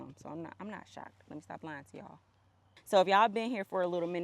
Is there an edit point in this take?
yes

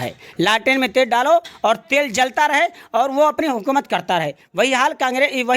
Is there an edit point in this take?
no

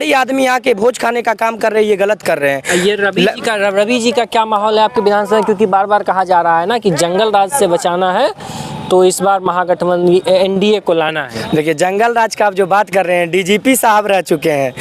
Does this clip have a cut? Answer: no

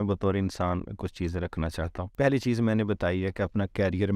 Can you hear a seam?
yes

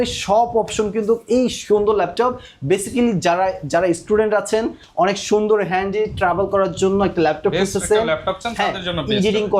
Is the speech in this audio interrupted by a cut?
no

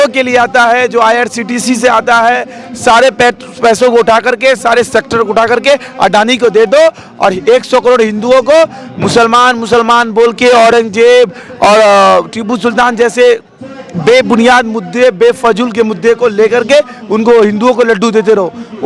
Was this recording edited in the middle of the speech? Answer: no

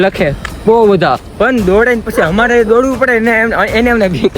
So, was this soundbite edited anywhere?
yes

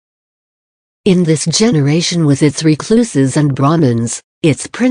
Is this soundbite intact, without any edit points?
yes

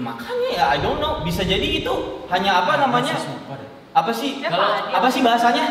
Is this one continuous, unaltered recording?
yes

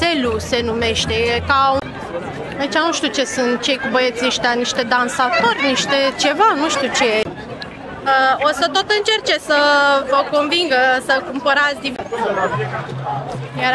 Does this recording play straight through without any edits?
no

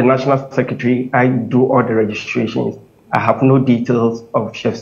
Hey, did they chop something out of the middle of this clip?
no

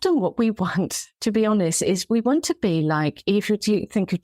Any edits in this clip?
yes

